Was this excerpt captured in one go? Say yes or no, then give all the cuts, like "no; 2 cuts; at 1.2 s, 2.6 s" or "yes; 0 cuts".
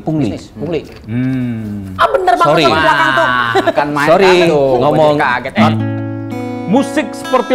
no; 1 cut; at 5.4 s